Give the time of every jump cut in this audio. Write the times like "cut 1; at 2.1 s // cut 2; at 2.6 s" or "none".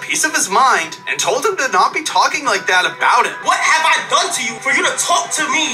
cut 1; at 3.4 s // cut 2; at 4.5 s